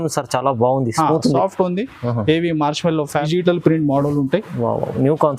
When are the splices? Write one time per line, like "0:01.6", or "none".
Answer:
0:03.3